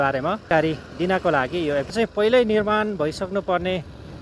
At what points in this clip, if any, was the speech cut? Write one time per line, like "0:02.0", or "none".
0:01.9